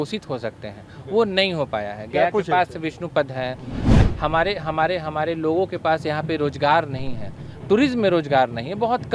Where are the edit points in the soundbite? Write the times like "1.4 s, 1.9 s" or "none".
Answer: 3.9 s